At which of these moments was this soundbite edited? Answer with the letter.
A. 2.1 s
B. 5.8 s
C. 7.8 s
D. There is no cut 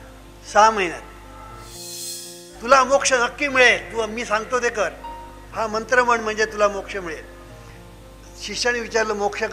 A